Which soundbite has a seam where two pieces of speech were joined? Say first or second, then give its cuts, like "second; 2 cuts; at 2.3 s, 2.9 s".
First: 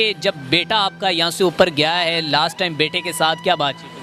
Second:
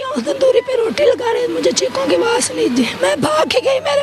second; 1 cut; at 2.9 s